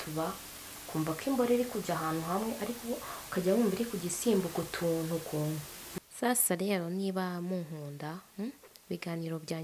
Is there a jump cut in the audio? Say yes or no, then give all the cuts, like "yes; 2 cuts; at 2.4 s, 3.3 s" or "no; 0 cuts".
yes; 1 cut; at 5.8 s